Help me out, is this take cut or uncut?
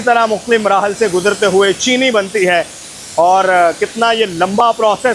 uncut